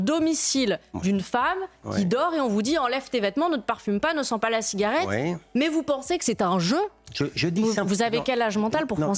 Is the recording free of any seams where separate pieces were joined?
yes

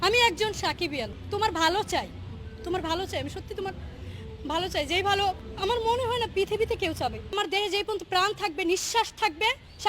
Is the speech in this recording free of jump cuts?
no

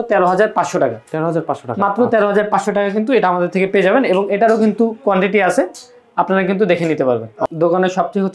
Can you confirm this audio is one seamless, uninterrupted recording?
yes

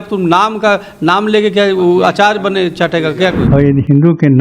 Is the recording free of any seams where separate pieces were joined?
no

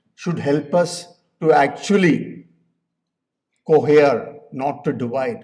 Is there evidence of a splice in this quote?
no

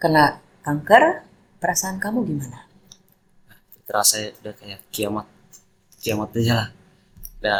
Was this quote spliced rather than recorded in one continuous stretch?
no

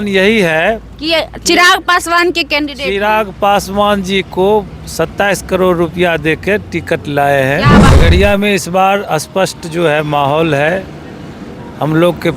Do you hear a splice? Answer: yes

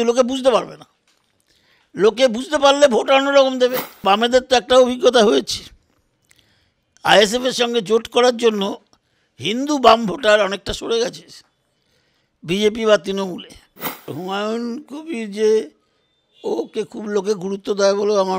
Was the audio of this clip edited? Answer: yes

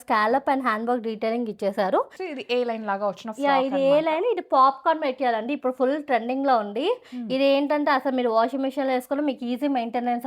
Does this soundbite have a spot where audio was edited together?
yes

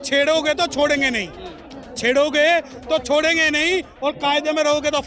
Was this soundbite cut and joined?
no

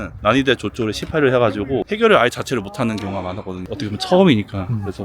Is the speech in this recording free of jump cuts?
no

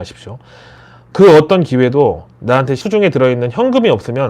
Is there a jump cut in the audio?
yes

